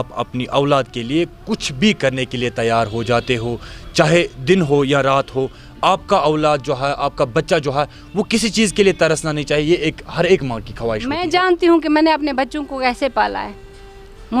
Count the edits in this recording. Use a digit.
1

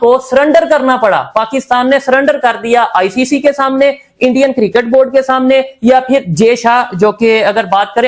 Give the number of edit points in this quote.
0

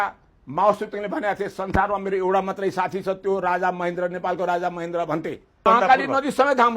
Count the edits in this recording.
1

